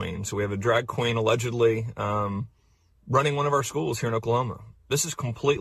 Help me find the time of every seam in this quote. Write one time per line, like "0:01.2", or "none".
0:02.6